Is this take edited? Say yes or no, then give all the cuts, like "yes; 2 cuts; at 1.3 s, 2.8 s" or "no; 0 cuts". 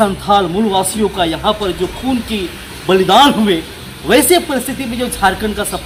no; 0 cuts